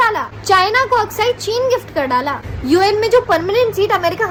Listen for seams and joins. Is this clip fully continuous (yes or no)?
yes